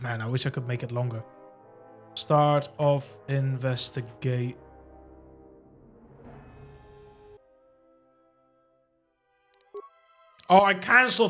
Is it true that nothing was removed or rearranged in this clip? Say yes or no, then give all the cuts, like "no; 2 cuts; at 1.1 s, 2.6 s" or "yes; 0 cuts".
no; 1 cut; at 7.4 s